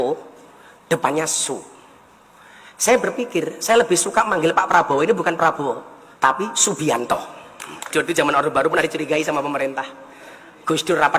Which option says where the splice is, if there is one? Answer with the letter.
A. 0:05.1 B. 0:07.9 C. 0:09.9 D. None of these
B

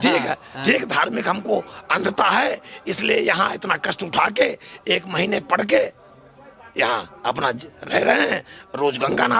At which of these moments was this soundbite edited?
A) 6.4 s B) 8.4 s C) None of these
C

